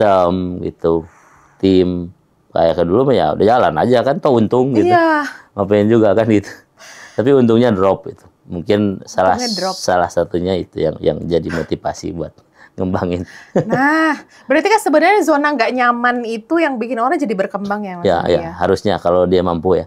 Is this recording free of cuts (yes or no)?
yes